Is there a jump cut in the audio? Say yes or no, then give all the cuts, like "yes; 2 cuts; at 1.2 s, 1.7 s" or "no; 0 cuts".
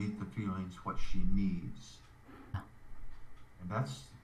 no; 0 cuts